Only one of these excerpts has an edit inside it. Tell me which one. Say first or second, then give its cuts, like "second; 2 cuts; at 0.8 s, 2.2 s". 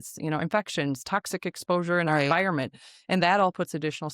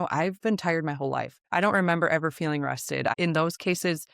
second; 2 cuts; at 1.4 s, 3.1 s